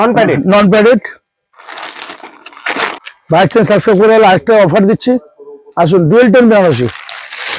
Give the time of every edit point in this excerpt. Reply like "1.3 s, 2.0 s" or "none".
2.9 s